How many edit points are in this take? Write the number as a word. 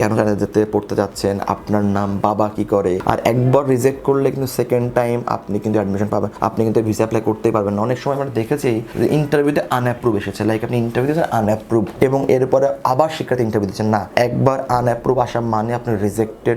one